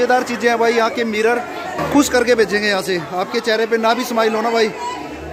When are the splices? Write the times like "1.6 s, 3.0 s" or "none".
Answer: 1.8 s